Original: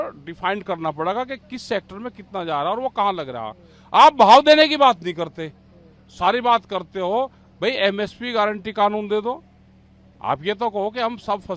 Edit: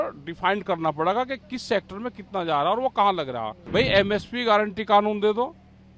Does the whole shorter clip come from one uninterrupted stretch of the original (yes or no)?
no